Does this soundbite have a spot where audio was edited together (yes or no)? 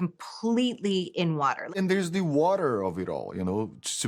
yes